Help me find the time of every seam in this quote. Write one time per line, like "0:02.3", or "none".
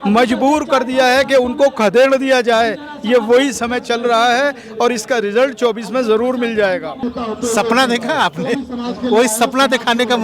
0:07.0